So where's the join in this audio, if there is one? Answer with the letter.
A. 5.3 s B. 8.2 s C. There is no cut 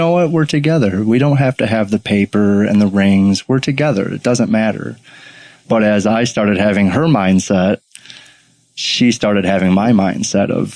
C